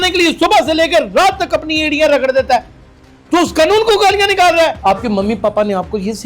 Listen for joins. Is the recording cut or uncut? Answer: cut